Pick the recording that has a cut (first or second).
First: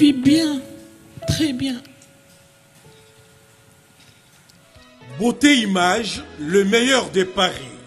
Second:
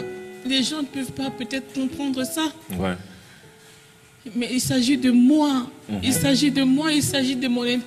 first